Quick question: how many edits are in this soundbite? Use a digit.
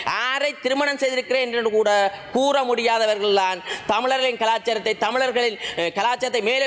0